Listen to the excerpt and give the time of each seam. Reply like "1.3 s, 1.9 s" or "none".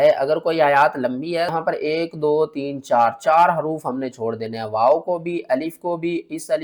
1.5 s